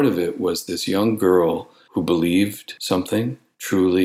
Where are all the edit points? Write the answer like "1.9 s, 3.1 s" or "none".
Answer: 1.7 s, 3.0 s